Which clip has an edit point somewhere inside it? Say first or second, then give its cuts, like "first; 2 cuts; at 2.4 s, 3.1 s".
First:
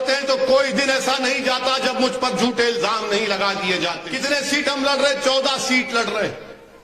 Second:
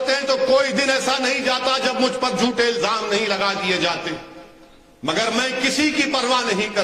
first; 1 cut; at 4.1 s